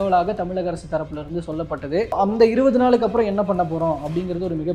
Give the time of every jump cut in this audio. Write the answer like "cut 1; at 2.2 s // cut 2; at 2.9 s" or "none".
cut 1; at 2.1 s